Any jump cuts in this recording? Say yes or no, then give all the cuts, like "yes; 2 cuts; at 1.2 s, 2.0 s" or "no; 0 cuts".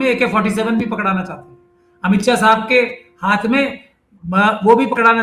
no; 0 cuts